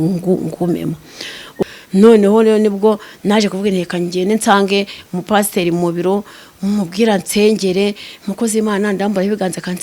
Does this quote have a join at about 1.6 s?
yes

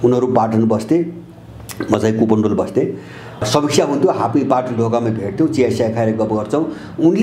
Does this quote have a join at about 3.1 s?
no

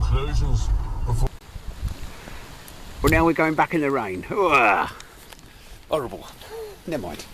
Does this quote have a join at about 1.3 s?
yes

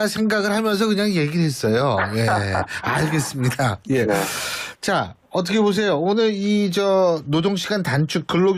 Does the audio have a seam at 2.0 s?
no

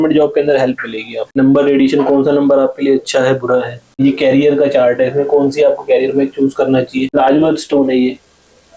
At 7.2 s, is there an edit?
yes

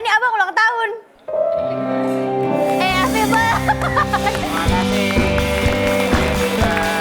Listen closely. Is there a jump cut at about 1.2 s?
no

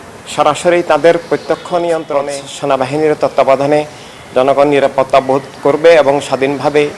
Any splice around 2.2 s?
yes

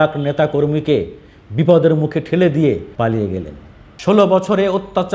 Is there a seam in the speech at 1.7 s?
no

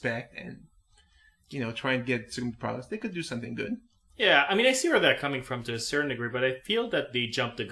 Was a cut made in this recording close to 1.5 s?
no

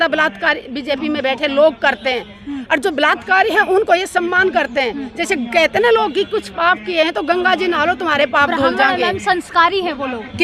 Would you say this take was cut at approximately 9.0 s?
no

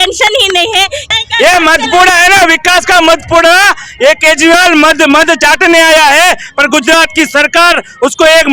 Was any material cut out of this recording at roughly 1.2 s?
yes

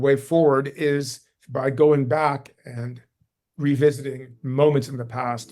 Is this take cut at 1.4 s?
no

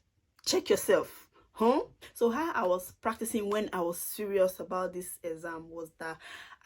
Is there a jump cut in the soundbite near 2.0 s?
yes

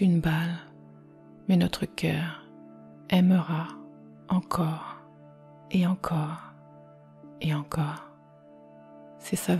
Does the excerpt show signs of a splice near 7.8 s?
no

